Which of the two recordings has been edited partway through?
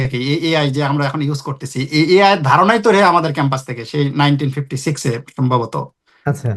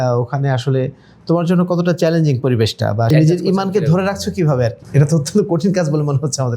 second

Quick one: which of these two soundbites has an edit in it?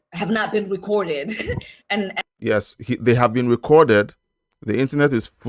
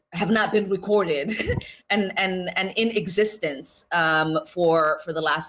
second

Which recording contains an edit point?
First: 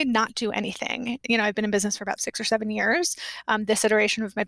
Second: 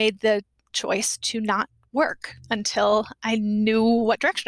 first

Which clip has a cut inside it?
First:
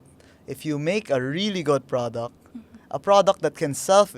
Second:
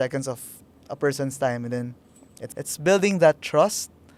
second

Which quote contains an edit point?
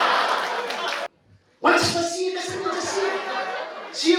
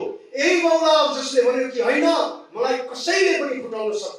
first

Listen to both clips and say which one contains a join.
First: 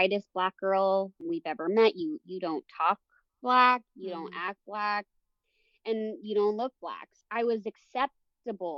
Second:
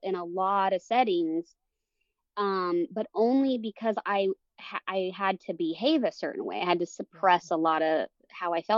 first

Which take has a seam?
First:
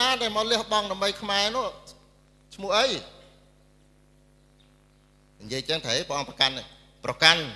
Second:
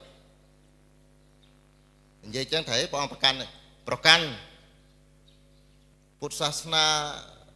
second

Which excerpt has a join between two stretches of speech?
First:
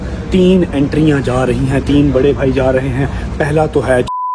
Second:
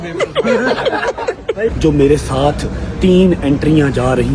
second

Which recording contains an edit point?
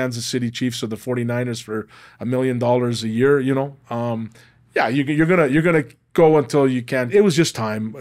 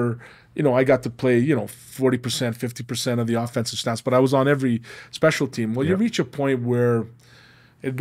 first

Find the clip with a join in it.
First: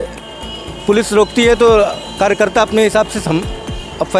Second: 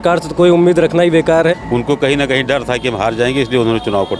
second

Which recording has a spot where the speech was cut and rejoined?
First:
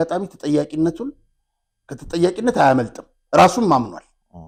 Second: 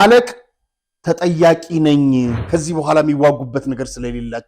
second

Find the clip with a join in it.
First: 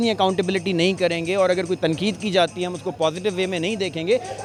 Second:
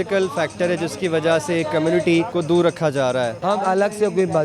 second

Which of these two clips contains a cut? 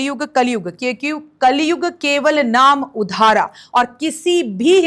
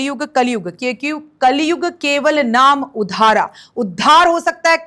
first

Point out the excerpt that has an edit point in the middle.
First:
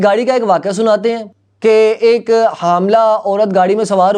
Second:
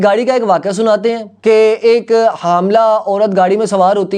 second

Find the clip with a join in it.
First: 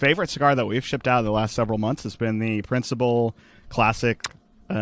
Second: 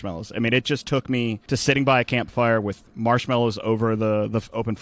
second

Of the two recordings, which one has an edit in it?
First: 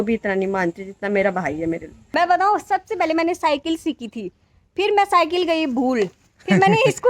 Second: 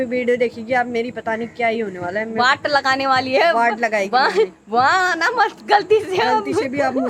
first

